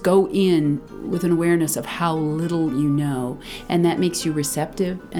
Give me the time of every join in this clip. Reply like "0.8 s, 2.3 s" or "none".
0.9 s